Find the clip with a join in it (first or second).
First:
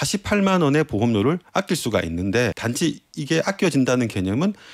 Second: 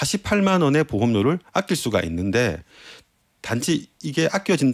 first